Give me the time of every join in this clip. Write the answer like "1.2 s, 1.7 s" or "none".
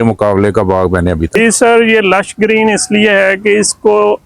1.3 s